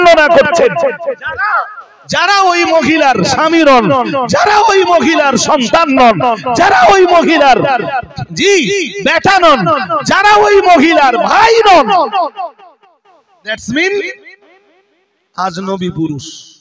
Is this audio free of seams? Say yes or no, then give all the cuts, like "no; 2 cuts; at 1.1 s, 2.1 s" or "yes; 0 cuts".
yes; 0 cuts